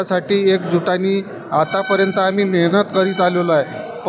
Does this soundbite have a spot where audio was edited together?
no; 0 cuts

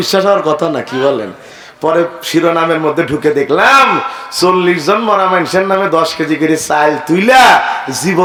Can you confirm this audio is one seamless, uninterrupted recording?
yes; 0 cuts

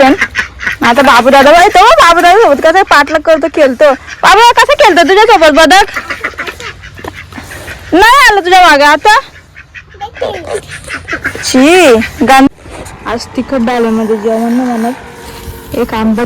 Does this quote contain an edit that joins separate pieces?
yes; 1 cut; at 12.5 s

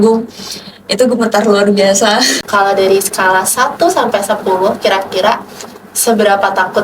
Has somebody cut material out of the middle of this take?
yes; 1 cut; at 2.3 s

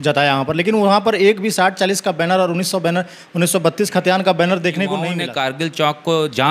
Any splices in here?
yes; 1 cut; at 5.1 s

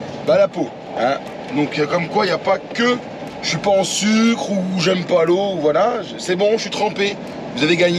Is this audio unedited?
yes; 0 cuts

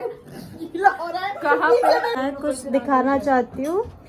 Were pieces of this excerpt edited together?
yes; 1 cut; at 2.1 s

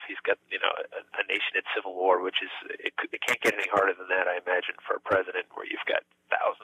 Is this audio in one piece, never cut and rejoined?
yes; 0 cuts

